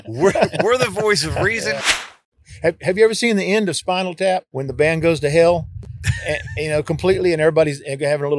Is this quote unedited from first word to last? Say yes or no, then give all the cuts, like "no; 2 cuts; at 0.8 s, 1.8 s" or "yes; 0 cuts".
no; 2 cuts; at 1.9 s, 4.6 s